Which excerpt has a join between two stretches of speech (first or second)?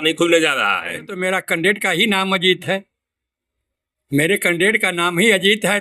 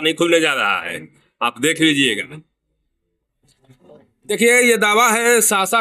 first